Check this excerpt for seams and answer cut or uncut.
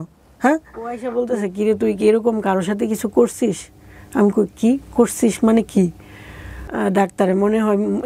cut